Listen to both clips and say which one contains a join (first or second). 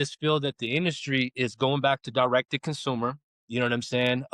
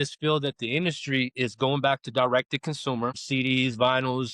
second